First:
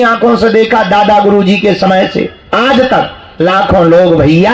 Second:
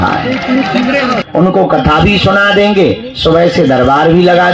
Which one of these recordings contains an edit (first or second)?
second